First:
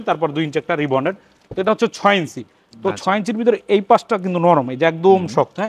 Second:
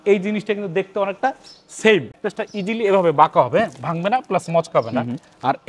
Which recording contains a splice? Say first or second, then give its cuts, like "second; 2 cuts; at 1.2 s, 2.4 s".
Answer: second; 1 cut; at 2.2 s